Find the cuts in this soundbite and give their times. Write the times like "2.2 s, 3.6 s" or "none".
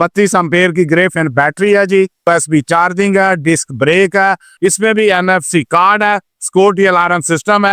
2.3 s, 4.5 s